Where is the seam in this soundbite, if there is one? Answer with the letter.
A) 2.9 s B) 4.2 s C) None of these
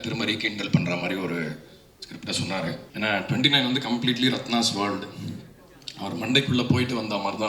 A